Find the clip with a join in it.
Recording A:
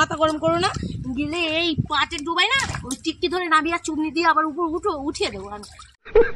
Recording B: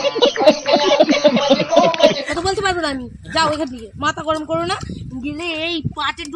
B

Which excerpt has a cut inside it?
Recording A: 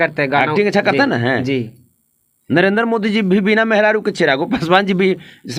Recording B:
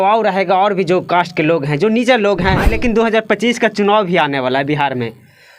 B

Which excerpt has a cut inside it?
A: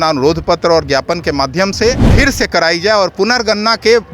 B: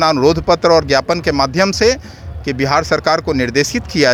A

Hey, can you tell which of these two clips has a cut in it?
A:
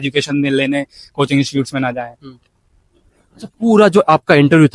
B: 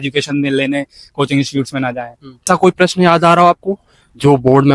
B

